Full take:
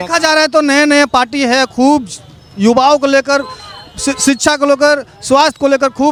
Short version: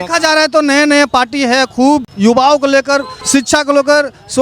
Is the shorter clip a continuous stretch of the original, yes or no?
no